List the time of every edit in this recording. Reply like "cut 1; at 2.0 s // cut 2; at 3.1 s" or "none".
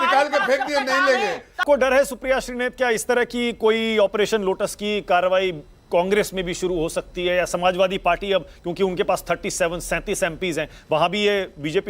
cut 1; at 1.6 s